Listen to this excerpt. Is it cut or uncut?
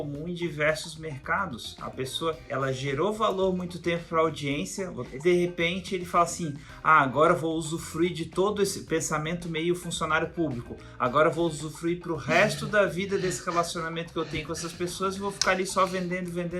cut